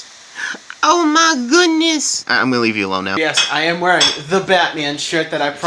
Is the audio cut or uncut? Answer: cut